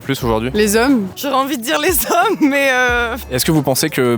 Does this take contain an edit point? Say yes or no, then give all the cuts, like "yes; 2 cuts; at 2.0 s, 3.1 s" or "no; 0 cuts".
yes; 2 cuts; at 1.1 s, 3.2 s